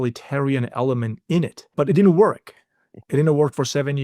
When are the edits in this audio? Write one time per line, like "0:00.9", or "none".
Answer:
0:01.7

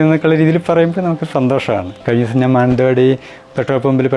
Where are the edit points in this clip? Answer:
0:01.9

